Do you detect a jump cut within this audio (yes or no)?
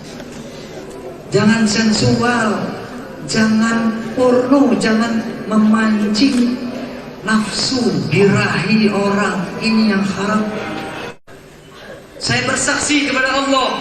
yes